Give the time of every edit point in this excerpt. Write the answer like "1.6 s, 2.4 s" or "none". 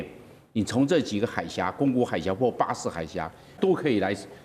3.6 s